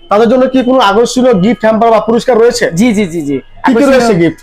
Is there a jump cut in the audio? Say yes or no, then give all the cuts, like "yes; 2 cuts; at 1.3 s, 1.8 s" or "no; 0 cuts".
no; 0 cuts